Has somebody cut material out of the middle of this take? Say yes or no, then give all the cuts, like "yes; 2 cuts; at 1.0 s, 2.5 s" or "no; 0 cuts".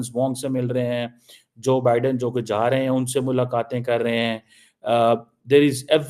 no; 0 cuts